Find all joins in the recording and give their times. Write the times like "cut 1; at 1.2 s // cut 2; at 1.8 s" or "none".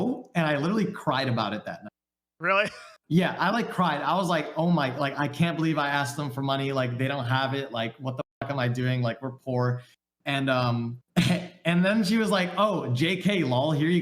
cut 1; at 11.0 s